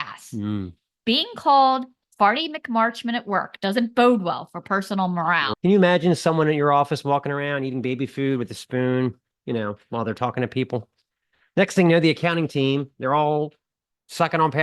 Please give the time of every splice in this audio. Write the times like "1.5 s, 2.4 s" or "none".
5.5 s